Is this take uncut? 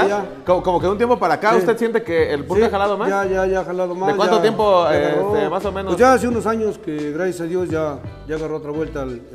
yes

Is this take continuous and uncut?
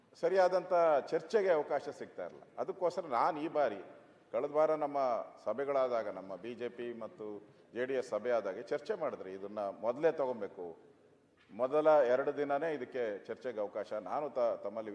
yes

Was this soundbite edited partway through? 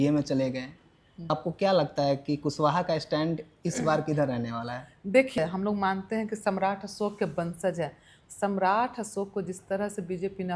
yes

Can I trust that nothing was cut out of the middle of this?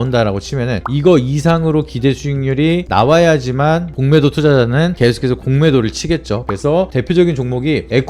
no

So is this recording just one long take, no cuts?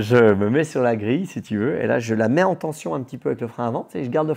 yes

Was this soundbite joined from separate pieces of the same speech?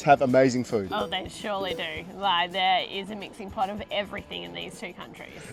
no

